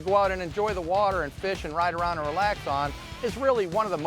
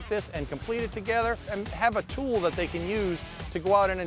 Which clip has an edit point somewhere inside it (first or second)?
second